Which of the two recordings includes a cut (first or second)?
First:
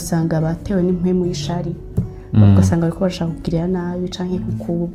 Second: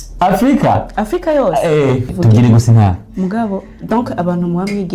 second